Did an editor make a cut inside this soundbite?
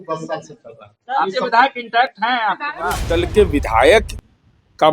yes; 1 cut; at 3.1 s

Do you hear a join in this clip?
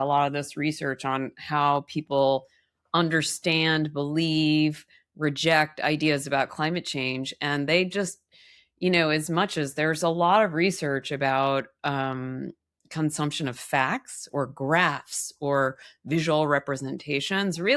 no; 0 cuts

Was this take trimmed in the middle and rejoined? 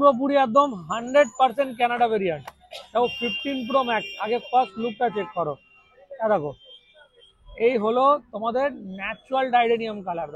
no; 0 cuts

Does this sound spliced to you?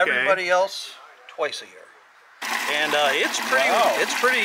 yes; 1 cut; at 2.4 s

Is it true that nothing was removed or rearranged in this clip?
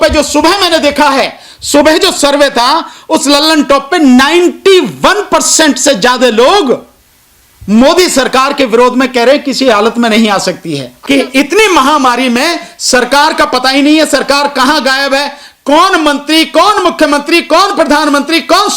no; 1 cut; at 10.9 s

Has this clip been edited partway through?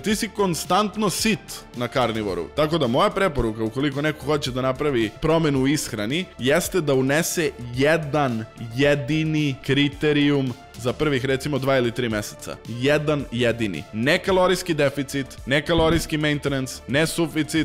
yes; 1 cut; at 2.5 s

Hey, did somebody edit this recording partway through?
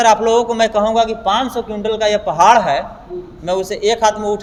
no; 0 cuts

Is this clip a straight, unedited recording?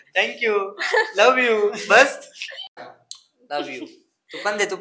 no; 1 cut; at 2.7 s

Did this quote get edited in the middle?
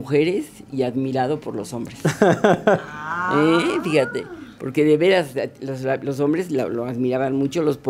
no; 0 cuts

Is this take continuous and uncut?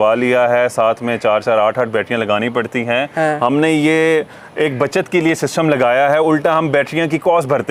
yes; 0 cuts

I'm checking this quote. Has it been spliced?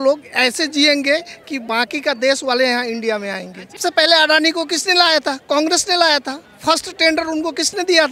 yes; 1 cut; at 3.8 s

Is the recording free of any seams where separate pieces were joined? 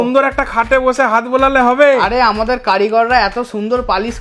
yes; 0 cuts

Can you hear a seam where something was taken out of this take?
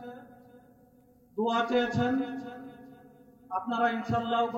no; 0 cuts

